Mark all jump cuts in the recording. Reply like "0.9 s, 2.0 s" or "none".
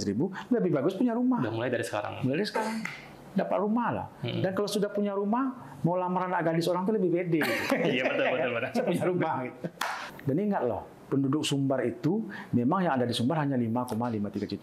10.1 s